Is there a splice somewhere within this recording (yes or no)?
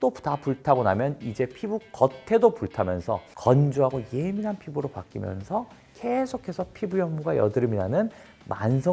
no